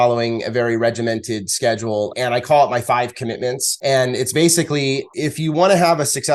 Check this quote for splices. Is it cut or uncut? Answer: cut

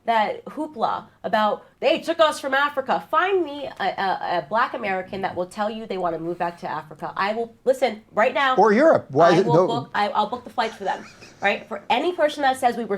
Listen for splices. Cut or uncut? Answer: cut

